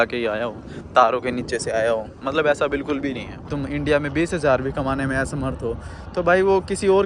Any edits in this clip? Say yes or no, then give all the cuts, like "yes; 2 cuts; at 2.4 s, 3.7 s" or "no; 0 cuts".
yes; 1 cut; at 3.5 s